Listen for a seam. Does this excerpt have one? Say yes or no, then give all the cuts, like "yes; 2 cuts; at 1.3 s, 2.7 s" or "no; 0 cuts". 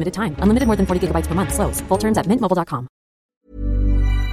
yes; 1 cut; at 3.4 s